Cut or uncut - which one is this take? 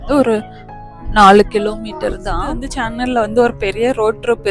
cut